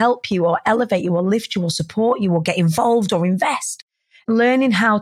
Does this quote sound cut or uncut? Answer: cut